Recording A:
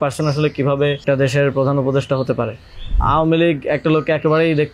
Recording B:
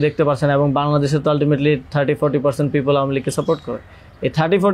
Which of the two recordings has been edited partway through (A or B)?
A